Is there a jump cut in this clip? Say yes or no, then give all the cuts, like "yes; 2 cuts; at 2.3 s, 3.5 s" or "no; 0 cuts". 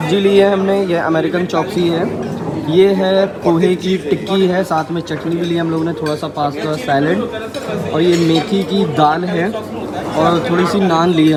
no; 0 cuts